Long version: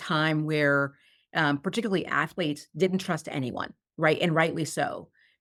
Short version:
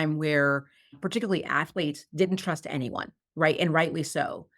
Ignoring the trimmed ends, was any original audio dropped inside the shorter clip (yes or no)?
yes